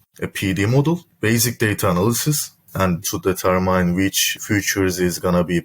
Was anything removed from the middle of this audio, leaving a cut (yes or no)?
yes